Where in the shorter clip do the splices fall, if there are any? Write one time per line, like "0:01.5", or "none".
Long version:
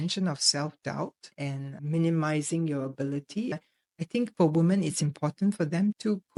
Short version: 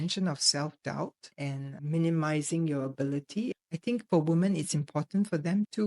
0:03.7

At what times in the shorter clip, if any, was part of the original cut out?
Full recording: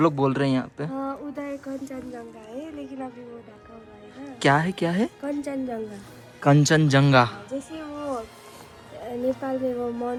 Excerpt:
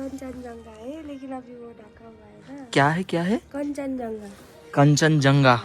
none

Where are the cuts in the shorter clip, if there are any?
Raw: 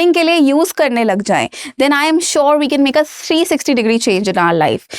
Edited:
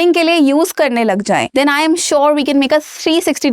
0:01.5

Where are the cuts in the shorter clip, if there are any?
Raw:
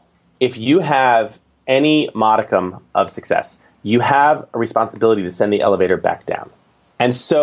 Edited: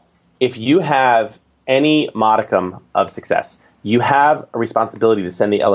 none

